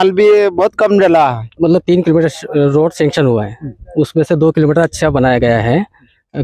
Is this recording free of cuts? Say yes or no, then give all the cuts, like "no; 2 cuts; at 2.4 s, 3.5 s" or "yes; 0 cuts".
no; 1 cut; at 1.4 s